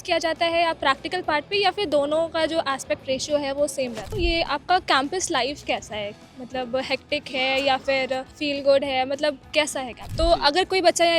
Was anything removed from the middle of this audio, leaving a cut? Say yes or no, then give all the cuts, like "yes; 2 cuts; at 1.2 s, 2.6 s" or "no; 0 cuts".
yes; 3 cuts; at 4.1 s, 8.3 s, 10.1 s